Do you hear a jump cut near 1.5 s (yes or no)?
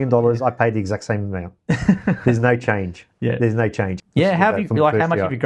no